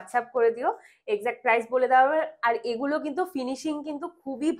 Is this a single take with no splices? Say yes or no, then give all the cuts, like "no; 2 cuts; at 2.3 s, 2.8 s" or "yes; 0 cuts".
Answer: yes; 0 cuts